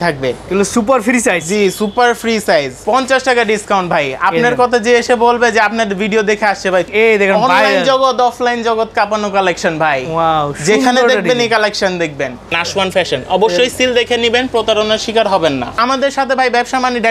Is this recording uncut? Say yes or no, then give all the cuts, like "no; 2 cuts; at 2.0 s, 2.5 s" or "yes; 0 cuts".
no; 4 cuts; at 2.8 s, 6.9 s, 12.6 s, 15.8 s